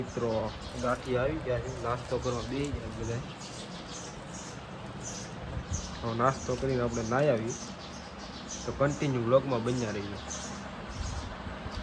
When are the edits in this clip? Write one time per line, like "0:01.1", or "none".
none